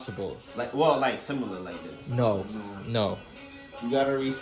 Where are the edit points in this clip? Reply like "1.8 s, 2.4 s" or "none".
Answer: none